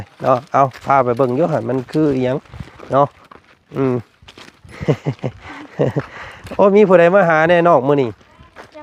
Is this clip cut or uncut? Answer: uncut